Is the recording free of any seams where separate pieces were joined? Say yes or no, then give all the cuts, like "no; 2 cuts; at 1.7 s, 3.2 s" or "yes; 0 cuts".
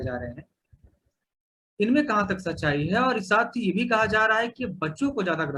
yes; 0 cuts